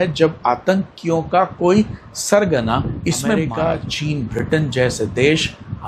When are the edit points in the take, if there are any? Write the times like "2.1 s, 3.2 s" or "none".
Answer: 3.5 s